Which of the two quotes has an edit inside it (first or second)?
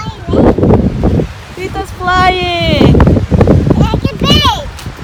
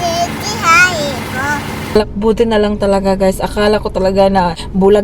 second